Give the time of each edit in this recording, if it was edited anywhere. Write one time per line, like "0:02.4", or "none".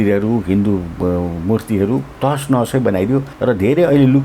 0:03.3